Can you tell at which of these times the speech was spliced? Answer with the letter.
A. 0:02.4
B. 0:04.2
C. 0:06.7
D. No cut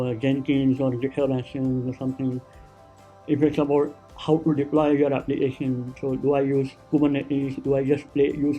C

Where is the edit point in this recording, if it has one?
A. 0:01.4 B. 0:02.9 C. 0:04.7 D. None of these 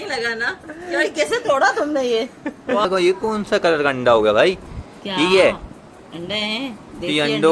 B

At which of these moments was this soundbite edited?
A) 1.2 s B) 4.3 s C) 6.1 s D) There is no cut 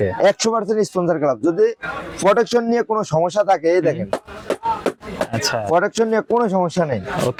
D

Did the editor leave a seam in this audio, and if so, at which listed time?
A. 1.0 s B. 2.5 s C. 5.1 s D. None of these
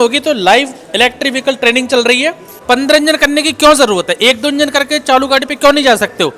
B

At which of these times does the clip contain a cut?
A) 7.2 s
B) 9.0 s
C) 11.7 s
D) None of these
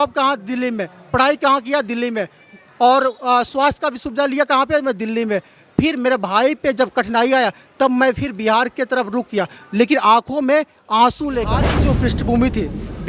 C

